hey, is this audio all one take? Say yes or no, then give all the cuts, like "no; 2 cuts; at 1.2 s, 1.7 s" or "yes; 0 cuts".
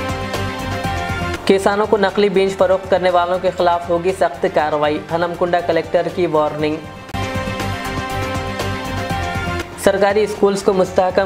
yes; 0 cuts